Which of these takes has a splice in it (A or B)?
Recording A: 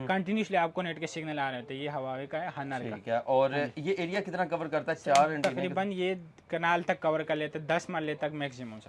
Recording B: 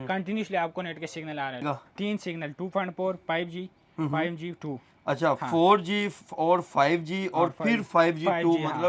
B